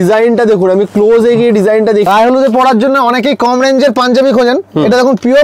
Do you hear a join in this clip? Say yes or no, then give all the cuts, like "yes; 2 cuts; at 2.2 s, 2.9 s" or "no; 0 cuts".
yes; 1 cut; at 2.1 s